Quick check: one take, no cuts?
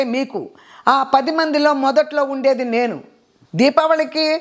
no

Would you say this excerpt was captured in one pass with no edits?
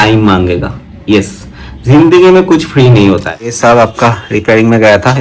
no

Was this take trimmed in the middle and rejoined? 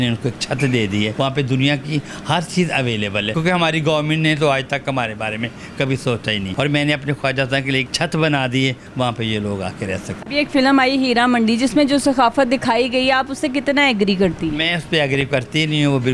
yes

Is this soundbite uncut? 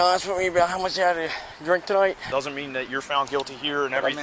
no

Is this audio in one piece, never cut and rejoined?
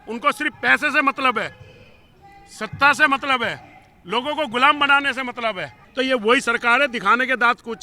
no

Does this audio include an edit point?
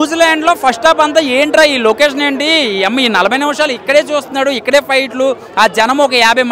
no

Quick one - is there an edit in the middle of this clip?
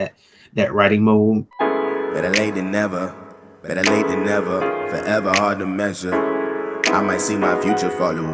yes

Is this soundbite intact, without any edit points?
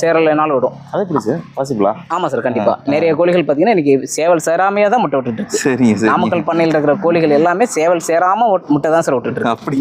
yes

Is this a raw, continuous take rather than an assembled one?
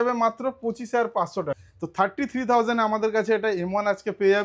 no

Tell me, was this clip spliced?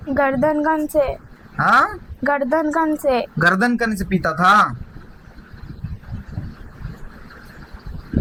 no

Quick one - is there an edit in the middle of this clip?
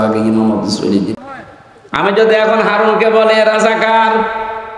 yes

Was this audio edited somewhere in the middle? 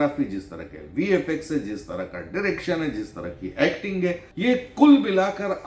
yes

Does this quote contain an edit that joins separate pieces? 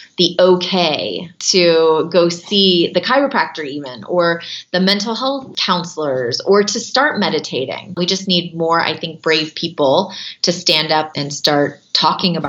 yes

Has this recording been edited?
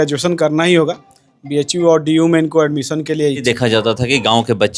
yes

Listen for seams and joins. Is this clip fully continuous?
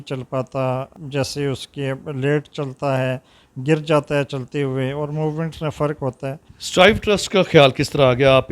no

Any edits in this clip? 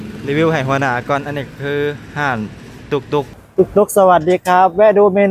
yes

